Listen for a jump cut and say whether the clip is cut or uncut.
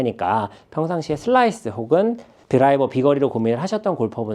cut